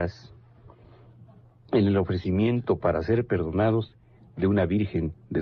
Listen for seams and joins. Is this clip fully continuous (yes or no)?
no